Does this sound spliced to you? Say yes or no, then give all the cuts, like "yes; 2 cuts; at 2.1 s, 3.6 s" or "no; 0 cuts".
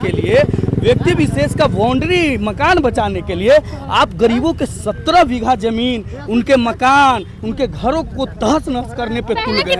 no; 0 cuts